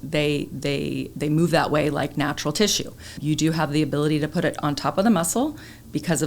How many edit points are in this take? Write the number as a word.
one